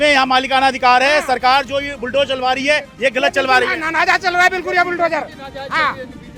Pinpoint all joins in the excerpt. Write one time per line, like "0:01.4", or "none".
none

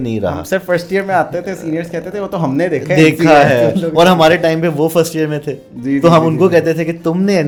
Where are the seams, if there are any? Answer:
none

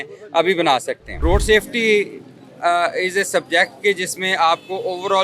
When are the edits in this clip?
0:01.0

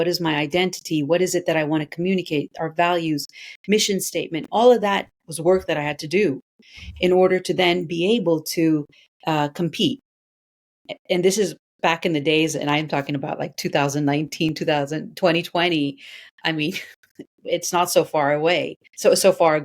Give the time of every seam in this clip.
none

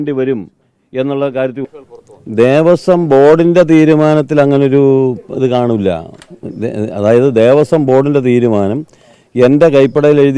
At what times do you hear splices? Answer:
0:01.6

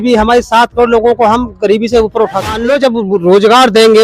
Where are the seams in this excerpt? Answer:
0:02.6

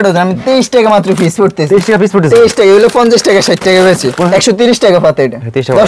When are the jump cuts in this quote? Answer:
0:04.3

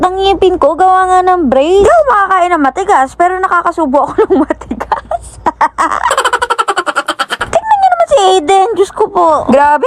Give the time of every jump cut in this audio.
0:07.3

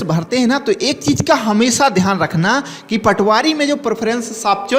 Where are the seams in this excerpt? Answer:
none

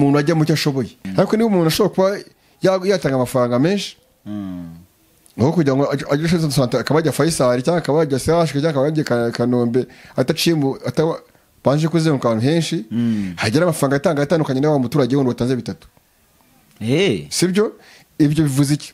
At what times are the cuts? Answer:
0:01.0

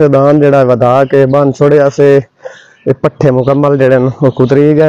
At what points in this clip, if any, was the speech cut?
none

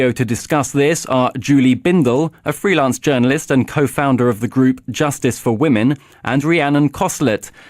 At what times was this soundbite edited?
0:02.3

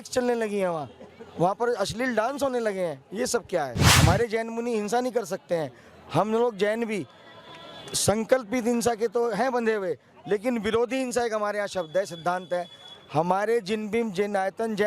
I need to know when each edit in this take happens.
0:03.8

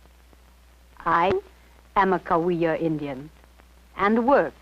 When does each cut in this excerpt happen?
0:01.5

